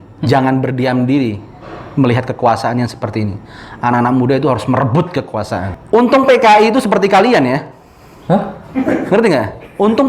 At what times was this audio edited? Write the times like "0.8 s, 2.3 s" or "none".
5.7 s